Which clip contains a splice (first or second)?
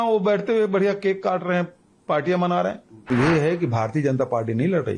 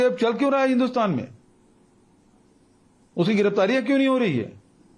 first